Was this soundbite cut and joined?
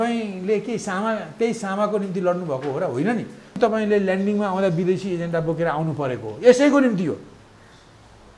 yes; 1 cut; at 3.6 s

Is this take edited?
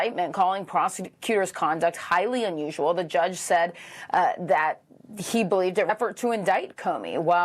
yes; 1 cut; at 5.9 s

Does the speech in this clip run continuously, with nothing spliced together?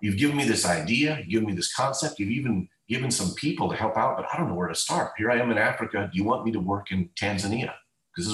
yes; 0 cuts

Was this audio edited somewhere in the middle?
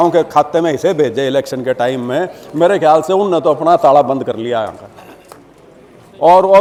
no; 0 cuts

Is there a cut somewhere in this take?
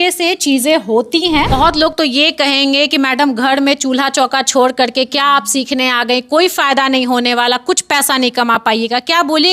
yes; 1 cut; at 1.6 s

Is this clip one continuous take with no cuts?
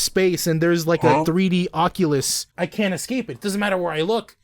no; 1 cut; at 2.4 s

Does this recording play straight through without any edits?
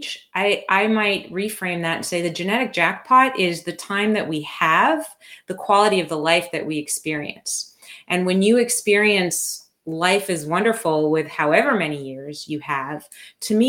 yes; 0 cuts

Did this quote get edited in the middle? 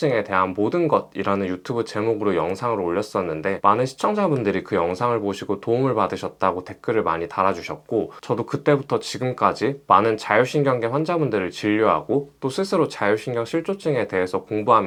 no; 0 cuts

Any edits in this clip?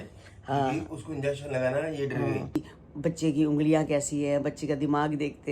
yes; 1 cut; at 2.7 s

